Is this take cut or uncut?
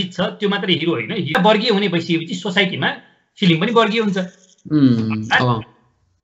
cut